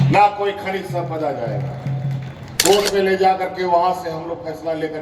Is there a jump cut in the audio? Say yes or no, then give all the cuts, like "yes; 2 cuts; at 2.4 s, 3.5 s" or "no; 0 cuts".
yes; 1 cut; at 2.5 s